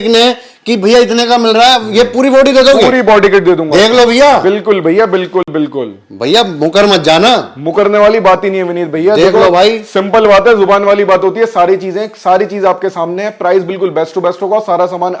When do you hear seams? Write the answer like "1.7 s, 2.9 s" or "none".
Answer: none